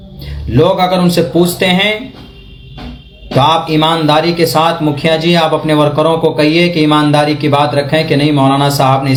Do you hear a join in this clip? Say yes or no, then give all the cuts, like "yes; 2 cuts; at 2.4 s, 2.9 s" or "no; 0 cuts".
no; 0 cuts